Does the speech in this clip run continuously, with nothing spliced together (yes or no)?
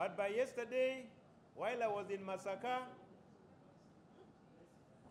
yes